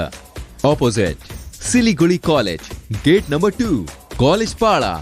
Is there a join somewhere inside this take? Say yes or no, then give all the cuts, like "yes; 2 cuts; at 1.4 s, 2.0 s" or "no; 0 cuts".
no; 0 cuts